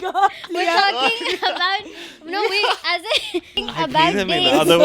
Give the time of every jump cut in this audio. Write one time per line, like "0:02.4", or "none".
0:03.5